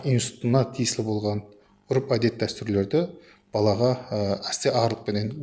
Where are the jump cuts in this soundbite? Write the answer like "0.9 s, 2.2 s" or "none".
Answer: none